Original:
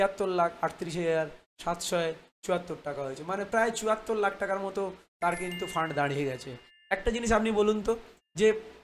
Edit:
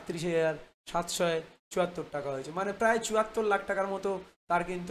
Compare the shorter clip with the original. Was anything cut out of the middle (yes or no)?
no